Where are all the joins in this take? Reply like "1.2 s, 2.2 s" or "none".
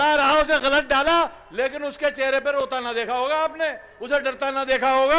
none